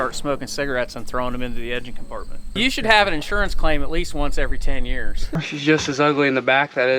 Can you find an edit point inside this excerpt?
yes; 2 cuts; at 2.4 s, 5.3 s

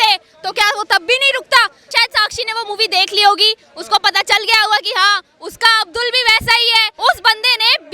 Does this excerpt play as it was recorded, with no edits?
no; 2 cuts; at 1.9 s, 6.9 s

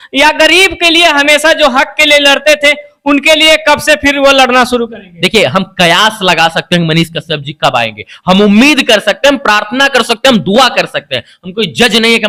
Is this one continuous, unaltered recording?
yes; 0 cuts

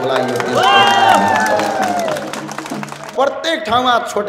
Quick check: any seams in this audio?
yes; 1 cut; at 3.1 s

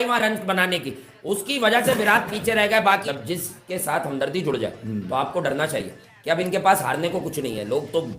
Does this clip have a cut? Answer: yes; 1 cut; at 3.0 s

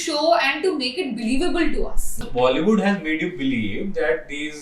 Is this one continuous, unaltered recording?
no; 1 cut; at 2.2 s

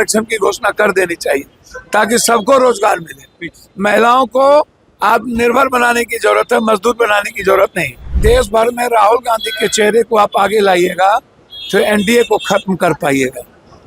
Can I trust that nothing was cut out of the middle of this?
no; 1 cut; at 8.1 s

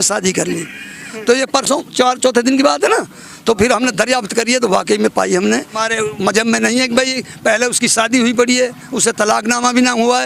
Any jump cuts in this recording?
yes; 1 cut; at 5.8 s

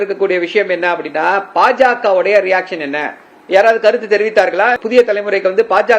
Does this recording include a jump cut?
yes; 1 cut; at 4.8 s

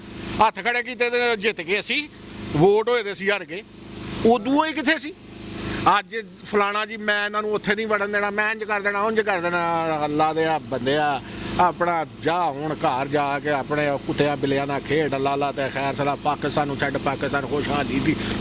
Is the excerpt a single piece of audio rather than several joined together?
yes; 0 cuts

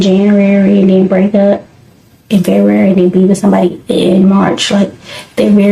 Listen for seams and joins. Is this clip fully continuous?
yes; 0 cuts

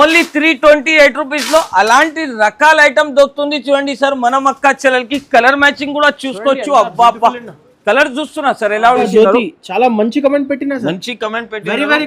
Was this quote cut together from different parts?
yes; 1 cut; at 9.0 s

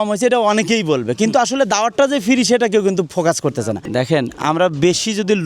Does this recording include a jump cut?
yes; 1 cut; at 3.8 s

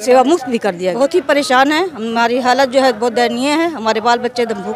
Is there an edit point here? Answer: yes; 1 cut; at 1.0 s

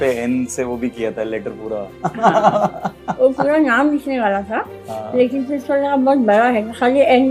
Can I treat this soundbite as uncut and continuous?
no; 1 cut; at 2.9 s

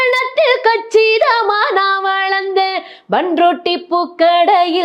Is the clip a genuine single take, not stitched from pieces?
yes; 0 cuts

